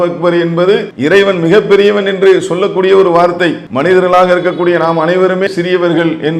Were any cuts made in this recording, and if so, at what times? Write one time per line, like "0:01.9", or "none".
0:00.9
0:03.7

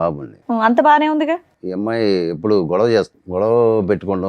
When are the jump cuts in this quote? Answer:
0:01.6
0:03.2

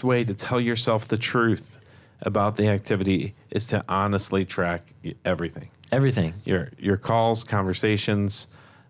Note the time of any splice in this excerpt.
none

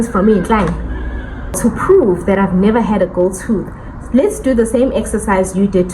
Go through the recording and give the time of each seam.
0:01.5

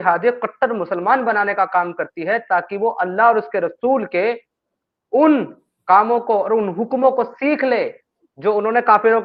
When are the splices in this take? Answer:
none

